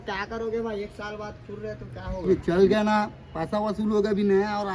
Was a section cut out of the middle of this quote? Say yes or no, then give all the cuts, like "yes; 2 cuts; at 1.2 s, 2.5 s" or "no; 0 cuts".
yes; 1 cut; at 2.3 s